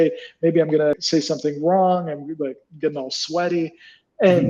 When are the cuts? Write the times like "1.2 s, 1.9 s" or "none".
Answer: 0.9 s